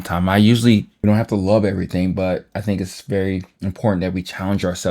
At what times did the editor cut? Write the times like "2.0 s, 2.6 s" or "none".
0.9 s